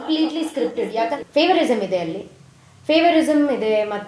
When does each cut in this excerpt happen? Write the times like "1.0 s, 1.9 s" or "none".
1.1 s